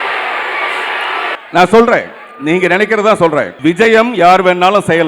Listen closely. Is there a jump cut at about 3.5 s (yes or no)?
yes